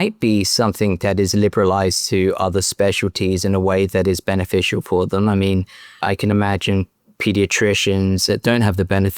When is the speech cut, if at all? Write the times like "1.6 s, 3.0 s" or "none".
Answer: 8.3 s